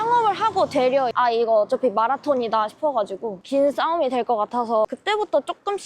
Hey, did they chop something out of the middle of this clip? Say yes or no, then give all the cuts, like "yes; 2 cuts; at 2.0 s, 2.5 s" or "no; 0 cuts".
yes; 2 cuts; at 1.1 s, 4.8 s